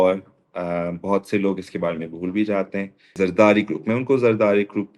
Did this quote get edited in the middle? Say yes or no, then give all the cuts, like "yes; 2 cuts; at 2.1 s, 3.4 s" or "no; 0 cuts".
yes; 1 cut; at 3.2 s